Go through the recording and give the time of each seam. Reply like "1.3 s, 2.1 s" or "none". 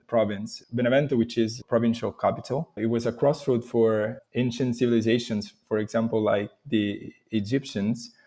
1.6 s, 2.7 s